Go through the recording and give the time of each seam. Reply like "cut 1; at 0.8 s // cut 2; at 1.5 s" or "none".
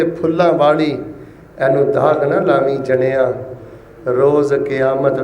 none